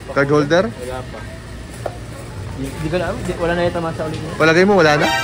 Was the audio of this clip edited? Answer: no; 0 cuts

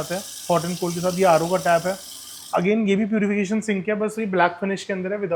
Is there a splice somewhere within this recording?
no; 0 cuts

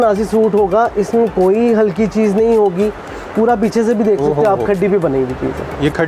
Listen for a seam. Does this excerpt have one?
no; 0 cuts

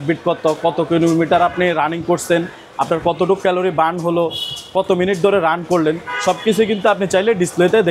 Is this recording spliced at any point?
no; 0 cuts

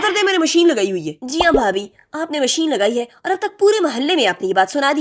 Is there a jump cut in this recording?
yes; 1 cut; at 1.2 s

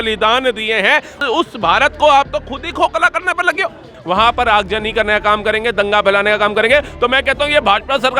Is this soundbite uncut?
no; 2 cuts; at 1.2 s, 3.9 s

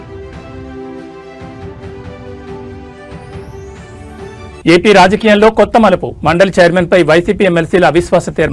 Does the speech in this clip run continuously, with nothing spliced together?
no; 1 cut; at 4.6 s

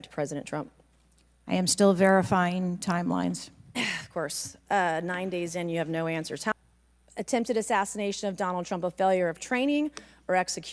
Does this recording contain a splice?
yes; 1 cut; at 6.4 s

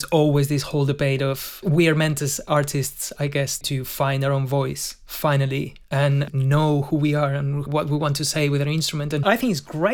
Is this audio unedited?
no; 5 cuts; at 1.6 s, 3.6 s, 6.3 s, 7.6 s, 9.2 s

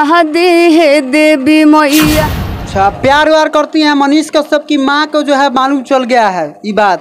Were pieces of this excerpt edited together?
yes; 1 cut; at 2.4 s

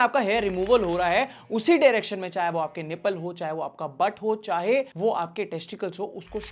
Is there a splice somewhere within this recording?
no; 0 cuts

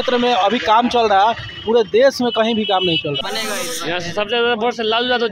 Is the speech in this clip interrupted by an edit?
yes; 1 cut; at 3.3 s

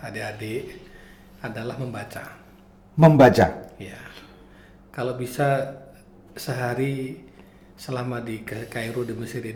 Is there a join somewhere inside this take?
no; 0 cuts

